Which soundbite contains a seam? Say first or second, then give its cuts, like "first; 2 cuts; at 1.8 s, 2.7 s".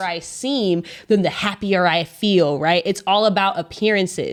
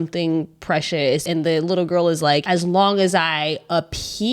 second; 2 cuts; at 1.2 s, 2.4 s